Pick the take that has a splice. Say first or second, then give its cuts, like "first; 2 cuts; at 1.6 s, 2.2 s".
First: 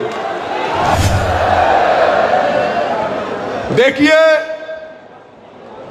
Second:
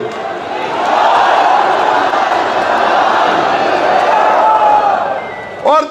first; 1 cut; at 1.0 s